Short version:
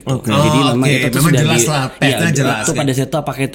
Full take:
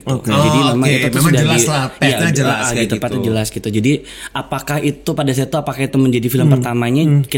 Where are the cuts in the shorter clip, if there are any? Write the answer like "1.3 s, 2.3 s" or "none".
2.6 s